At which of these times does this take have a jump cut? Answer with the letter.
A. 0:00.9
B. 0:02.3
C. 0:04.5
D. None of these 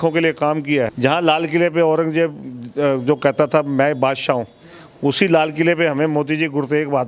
A